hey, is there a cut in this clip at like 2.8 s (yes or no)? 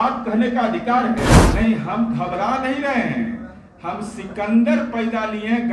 no